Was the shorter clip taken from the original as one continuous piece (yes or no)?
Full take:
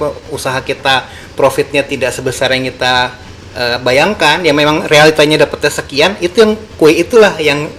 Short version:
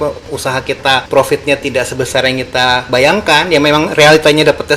no